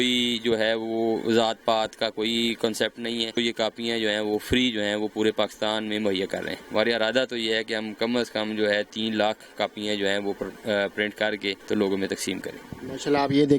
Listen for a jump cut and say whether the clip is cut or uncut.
cut